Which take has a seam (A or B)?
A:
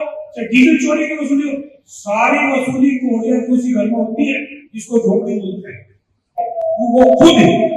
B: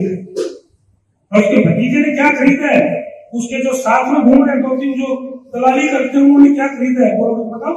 A